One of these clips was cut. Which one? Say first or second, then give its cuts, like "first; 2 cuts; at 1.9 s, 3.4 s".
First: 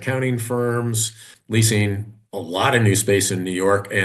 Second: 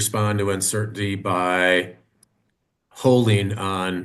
first; 1 cut; at 1.3 s